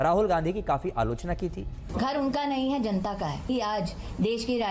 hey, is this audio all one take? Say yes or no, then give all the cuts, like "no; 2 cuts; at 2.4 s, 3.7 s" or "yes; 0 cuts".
no; 2 cuts; at 1.8 s, 3.5 s